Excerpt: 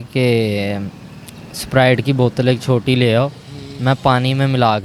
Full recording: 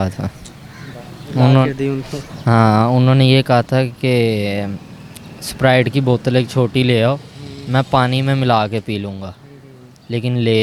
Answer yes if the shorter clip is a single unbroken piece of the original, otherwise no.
yes